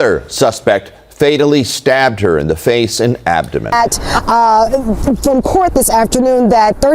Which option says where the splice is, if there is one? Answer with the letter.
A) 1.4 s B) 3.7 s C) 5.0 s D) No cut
B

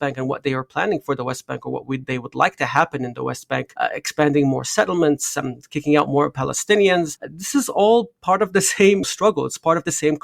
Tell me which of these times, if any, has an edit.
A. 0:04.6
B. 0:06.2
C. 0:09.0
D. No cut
C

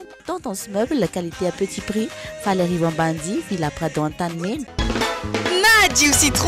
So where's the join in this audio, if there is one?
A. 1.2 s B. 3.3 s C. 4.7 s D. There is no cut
C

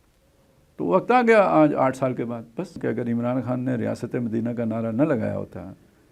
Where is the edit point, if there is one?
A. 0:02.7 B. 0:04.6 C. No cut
A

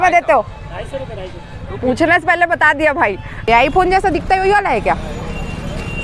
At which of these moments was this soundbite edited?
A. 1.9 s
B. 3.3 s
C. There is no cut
B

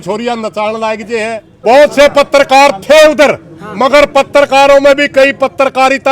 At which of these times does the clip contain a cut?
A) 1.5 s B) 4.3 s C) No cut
A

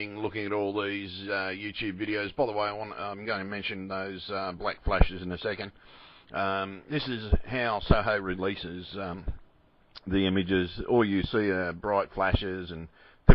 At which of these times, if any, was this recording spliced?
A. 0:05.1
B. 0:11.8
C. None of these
B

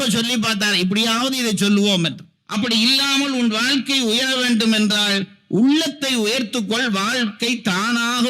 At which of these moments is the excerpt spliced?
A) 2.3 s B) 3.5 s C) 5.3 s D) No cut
A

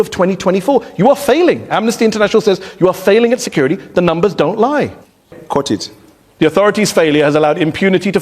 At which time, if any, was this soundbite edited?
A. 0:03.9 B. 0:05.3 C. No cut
B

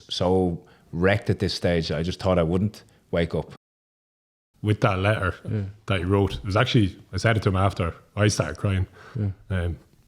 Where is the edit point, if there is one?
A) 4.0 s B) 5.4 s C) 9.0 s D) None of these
A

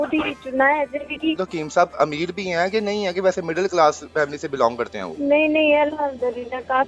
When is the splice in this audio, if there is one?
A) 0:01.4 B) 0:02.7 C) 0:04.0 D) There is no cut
A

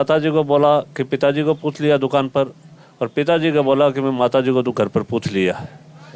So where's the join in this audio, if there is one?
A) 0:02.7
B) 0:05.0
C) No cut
C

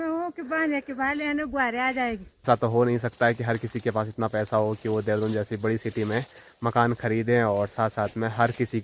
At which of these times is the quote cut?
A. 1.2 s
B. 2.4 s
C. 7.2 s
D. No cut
B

